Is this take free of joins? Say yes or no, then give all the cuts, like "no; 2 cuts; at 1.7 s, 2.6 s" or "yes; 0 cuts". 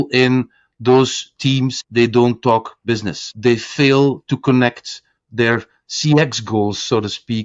no; 2 cuts; at 1.8 s, 3.3 s